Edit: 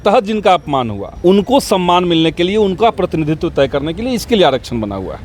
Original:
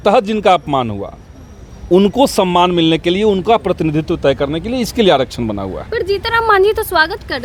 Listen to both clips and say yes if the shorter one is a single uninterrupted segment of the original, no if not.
no